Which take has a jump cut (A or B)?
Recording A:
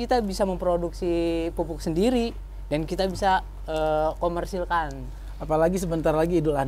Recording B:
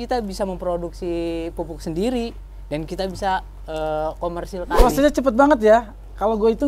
B